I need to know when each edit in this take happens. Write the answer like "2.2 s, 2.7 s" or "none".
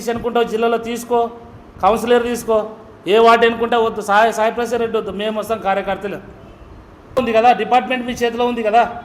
7.2 s

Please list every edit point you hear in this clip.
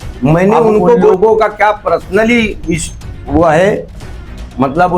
1.1 s

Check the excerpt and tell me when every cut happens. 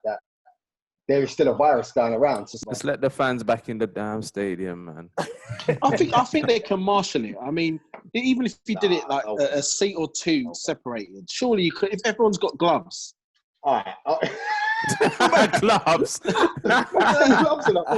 2.5 s

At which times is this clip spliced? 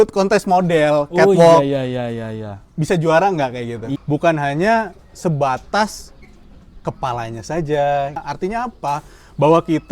3.9 s, 8.3 s

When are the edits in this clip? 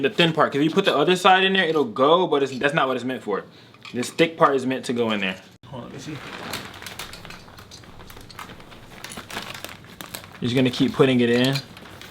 5.5 s

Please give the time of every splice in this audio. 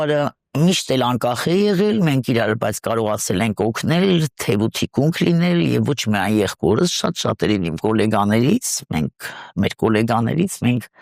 none

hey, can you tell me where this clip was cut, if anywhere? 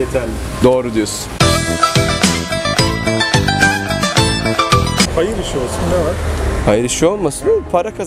5.1 s

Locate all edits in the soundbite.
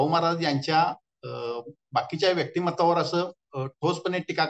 none

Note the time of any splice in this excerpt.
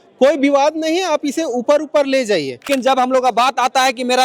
2.7 s

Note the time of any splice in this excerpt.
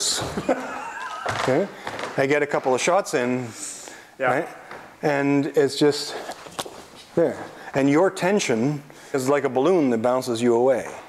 9.2 s

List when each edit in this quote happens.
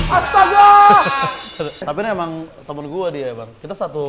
1.8 s

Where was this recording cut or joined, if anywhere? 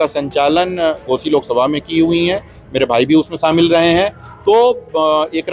none

